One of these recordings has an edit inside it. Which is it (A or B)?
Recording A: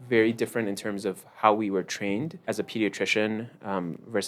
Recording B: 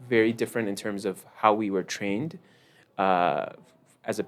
A